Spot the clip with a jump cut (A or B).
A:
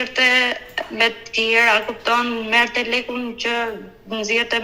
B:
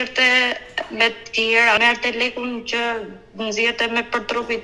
B